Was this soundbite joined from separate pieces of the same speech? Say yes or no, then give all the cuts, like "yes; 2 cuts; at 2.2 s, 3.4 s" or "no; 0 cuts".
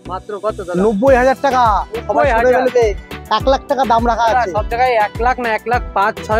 no; 0 cuts